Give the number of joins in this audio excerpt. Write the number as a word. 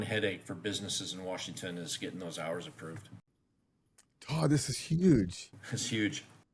zero